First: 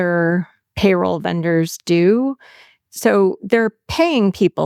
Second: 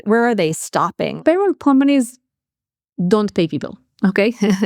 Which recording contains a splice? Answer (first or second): second